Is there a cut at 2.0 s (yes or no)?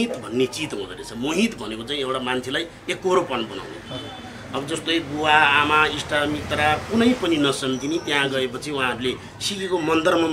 no